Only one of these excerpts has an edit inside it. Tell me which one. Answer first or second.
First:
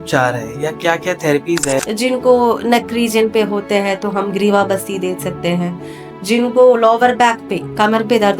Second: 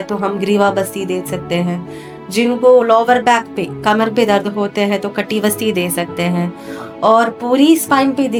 first